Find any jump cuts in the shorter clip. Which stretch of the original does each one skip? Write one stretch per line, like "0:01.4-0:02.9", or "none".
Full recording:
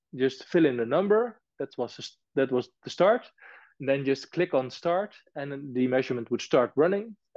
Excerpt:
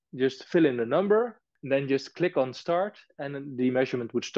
0:01.5-0:03.6